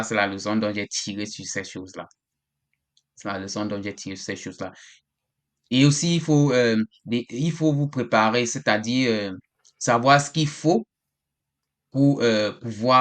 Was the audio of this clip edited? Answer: no; 0 cuts

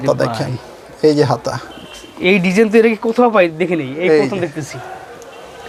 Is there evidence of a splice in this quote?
no; 0 cuts

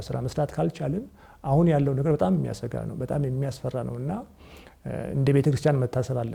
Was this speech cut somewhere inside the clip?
no; 0 cuts

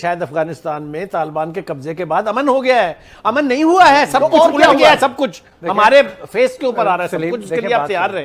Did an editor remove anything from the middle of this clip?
no; 0 cuts

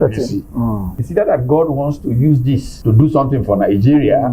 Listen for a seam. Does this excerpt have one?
yes; 2 cuts; at 0.9 s, 2.7 s

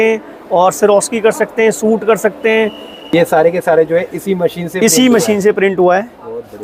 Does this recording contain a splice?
yes; 1 cut; at 3.1 s

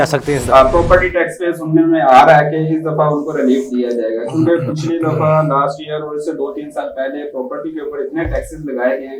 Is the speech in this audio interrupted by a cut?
no; 0 cuts

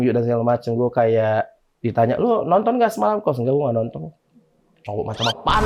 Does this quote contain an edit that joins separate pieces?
no; 0 cuts

